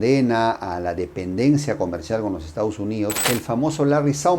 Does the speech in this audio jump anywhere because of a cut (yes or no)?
yes